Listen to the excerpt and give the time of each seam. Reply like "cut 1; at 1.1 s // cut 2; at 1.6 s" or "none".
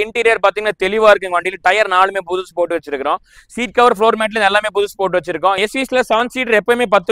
cut 1; at 5.6 s